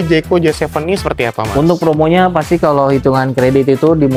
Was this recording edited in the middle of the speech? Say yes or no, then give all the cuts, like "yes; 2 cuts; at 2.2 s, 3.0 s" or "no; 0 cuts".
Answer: no; 0 cuts